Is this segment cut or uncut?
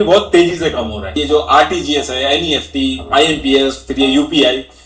cut